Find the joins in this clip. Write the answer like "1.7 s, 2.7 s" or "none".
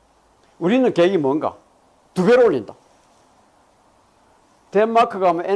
none